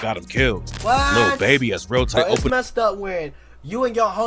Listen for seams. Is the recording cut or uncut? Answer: cut